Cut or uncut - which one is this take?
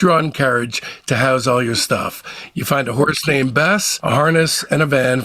uncut